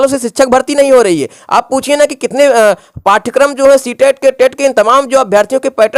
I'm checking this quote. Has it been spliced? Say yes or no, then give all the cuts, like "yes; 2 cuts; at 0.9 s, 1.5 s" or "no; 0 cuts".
no; 0 cuts